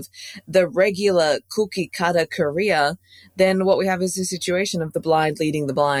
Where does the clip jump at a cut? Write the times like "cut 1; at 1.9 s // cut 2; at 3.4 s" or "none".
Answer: none